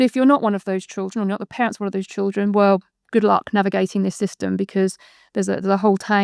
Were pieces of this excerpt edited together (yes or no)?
no